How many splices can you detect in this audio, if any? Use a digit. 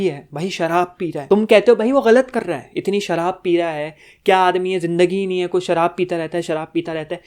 1